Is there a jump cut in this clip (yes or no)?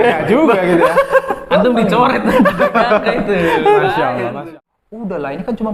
yes